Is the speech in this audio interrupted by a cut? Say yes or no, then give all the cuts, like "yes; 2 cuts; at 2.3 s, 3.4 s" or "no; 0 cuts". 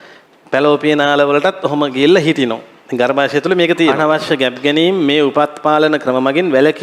yes; 1 cut; at 3.9 s